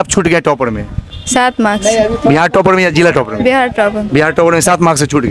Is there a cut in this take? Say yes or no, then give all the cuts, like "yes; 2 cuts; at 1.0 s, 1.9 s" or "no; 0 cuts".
no; 0 cuts